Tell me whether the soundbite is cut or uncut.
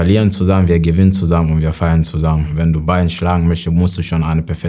cut